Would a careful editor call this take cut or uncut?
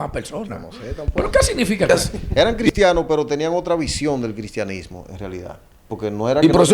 cut